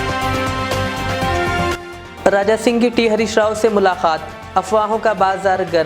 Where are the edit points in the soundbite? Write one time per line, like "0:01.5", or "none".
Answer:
0:01.7